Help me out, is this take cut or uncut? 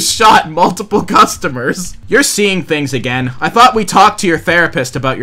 uncut